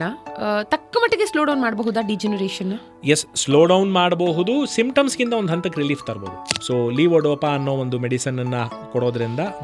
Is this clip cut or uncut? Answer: cut